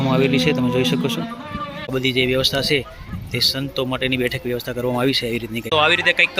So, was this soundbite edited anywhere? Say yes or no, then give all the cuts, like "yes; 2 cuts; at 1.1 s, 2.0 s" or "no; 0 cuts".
yes; 2 cuts; at 1.9 s, 5.7 s